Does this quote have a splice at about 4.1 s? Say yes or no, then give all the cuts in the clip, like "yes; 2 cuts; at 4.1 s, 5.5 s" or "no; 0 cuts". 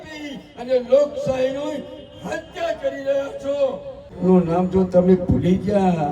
yes; 1 cut; at 4.1 s